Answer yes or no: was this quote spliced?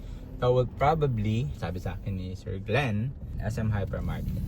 yes